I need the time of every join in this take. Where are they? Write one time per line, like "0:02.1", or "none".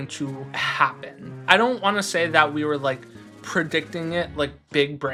none

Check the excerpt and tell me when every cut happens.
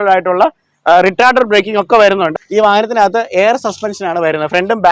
0:02.3

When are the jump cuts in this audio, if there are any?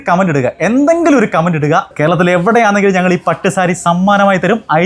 0:01.9

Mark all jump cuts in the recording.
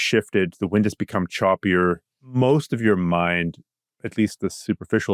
0:02.2

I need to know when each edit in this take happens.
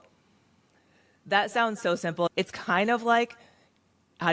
0:02.3

